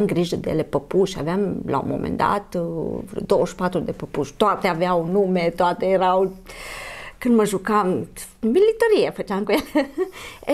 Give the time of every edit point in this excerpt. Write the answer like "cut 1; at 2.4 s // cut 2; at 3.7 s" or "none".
none